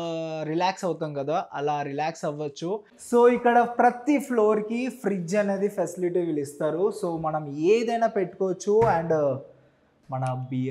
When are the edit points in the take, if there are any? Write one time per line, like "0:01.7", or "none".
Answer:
0:02.9